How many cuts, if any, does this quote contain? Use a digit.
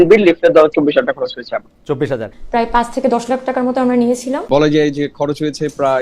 2